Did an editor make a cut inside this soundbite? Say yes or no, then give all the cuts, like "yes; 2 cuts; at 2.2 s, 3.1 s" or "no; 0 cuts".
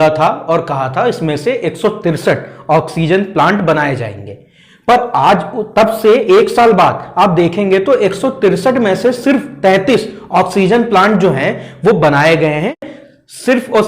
yes; 1 cut; at 12.9 s